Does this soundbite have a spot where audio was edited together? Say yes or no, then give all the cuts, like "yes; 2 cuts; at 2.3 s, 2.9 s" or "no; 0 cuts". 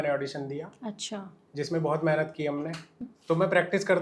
yes; 1 cut; at 3.0 s